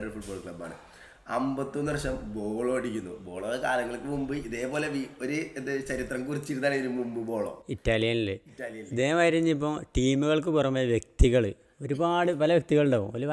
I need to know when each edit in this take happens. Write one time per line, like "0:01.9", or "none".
none